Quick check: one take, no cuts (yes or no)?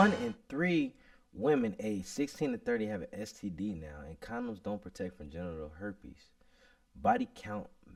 yes